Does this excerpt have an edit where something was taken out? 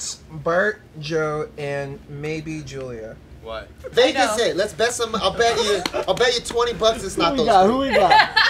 yes; 1 cut; at 3.9 s

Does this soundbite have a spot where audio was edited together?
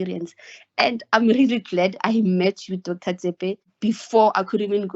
yes; 1 cut; at 3.7 s

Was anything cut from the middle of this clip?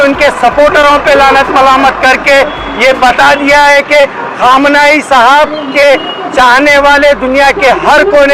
no; 0 cuts

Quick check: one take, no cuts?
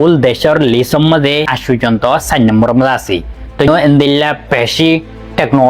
no; 2 cuts; at 1.5 s, 3.7 s

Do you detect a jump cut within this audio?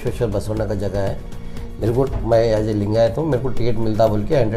no; 0 cuts

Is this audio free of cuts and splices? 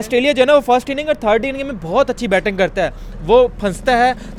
yes; 0 cuts

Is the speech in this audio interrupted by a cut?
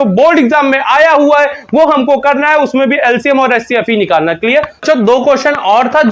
yes; 1 cut; at 4.8 s

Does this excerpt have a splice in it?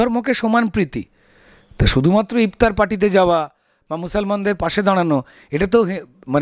no; 0 cuts

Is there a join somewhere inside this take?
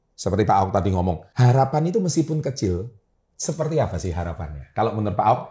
yes; 1 cut; at 1.3 s

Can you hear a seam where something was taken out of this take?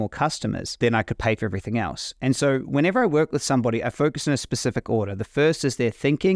no; 0 cuts

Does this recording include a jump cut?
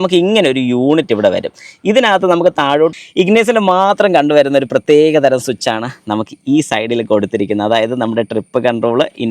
yes; 1 cut; at 2.9 s

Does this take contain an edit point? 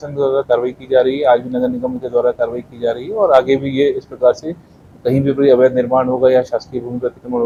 no; 0 cuts

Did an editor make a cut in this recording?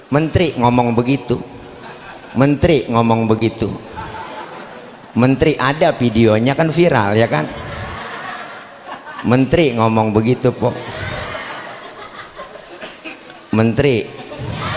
no; 0 cuts

